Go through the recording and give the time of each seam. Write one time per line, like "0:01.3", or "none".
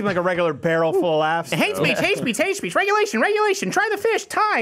0:01.5